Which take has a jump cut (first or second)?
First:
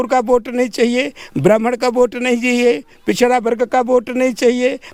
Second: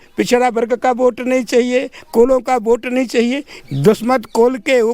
second